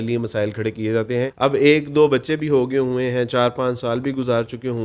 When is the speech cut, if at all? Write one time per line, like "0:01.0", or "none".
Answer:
0:01.3